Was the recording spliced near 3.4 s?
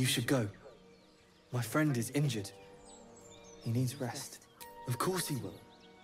no; 1 cut; at 5.0 s

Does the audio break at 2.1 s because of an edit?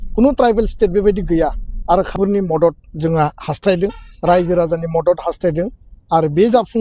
yes; 1 cut; at 2.1 s

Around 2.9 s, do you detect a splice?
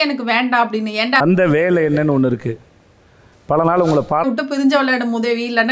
no; 2 cuts; at 1.2 s, 4.2 s

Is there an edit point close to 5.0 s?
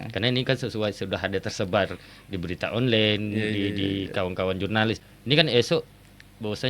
yes; 1 cut; at 5.0 s

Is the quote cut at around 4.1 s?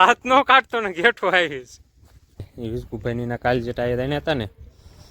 no; 1 cut; at 2.5 s

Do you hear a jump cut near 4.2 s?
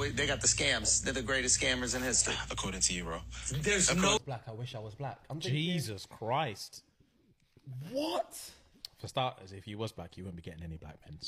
yes; 1 cut; at 4.2 s

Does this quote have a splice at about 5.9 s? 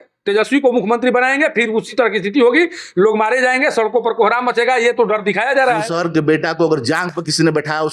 yes; 1 cut; at 5.9 s

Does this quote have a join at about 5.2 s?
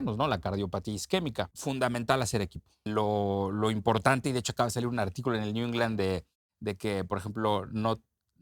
no; 2 cuts; at 1.5 s, 2.9 s

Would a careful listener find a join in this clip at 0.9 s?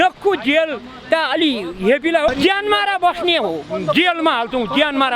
no; 1 cut; at 2.3 s

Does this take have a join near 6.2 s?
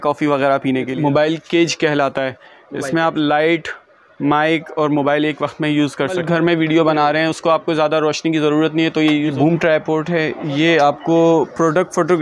yes; 3 cuts; at 0.9 s, 6.2 s, 9.3 s

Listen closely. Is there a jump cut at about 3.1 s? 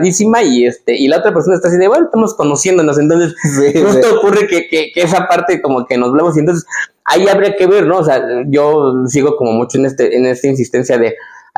no; 0 cuts

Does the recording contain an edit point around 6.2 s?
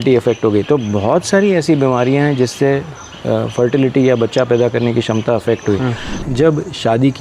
yes; 1 cut; at 6.2 s

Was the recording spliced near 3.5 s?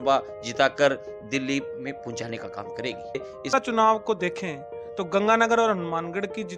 yes; 1 cut; at 3.5 s

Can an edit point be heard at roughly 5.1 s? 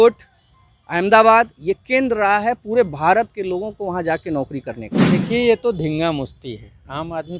yes; 1 cut; at 5.1 s

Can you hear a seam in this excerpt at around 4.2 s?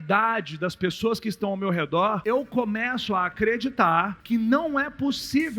yes; 2 cuts; at 2.2 s, 4.2 s

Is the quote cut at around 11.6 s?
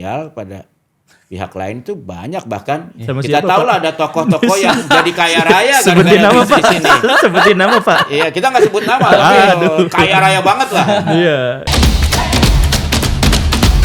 yes; 1 cut; at 11.6 s

